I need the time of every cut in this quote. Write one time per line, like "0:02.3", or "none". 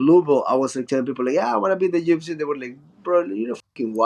none